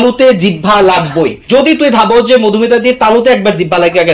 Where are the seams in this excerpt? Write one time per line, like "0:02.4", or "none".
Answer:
0:01.4